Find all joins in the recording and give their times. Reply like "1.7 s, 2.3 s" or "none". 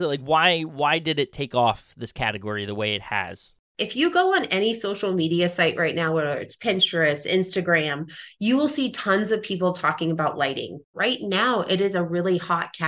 3.7 s, 10.9 s